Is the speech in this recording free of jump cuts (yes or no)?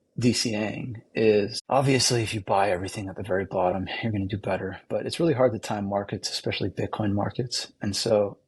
no